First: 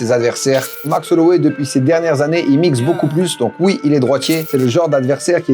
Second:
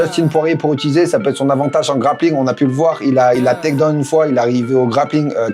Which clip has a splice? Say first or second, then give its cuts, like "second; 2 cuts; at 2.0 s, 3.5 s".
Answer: first; 2 cuts; at 0.9 s, 4.5 s